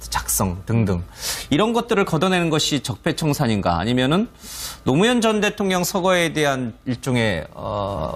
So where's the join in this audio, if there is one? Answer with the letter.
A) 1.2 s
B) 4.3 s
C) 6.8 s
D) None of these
D